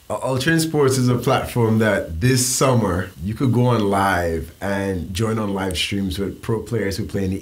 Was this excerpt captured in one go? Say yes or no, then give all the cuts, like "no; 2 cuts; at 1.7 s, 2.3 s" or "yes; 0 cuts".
no; 1 cut; at 3.2 s